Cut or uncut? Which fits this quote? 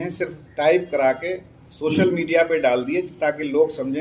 uncut